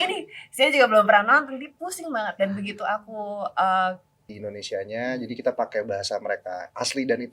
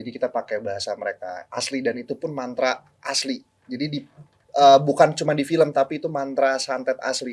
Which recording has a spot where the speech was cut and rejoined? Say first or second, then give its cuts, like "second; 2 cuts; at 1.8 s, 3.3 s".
first; 1 cut; at 4.3 s